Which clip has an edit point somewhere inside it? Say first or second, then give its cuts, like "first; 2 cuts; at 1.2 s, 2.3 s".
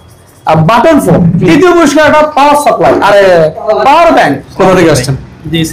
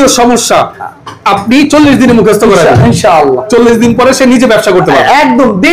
first; 2 cuts; at 1.5 s, 4.4 s